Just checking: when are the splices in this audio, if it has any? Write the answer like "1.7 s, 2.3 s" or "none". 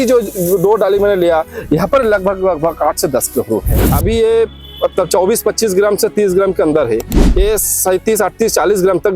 3.7 s